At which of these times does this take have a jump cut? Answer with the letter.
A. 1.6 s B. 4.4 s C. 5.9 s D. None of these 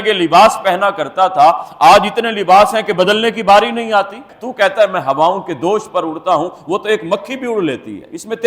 B